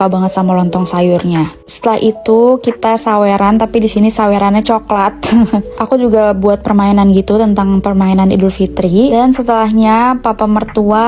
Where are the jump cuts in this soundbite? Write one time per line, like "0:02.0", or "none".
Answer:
none